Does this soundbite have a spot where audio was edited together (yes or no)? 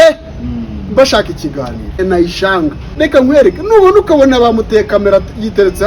yes